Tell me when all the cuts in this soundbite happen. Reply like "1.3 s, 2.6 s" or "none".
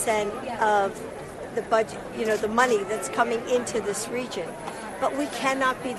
none